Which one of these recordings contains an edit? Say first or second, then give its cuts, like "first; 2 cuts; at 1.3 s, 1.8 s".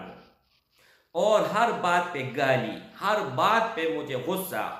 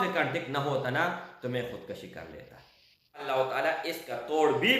second; 1 cut; at 3.2 s